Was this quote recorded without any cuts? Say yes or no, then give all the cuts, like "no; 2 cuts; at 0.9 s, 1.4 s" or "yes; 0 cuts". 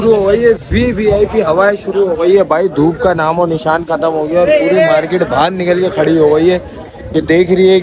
yes; 0 cuts